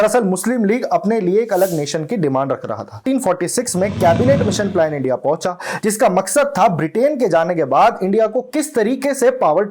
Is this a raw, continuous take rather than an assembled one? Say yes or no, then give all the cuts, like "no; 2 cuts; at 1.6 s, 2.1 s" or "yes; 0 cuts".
no; 1 cut; at 3.0 s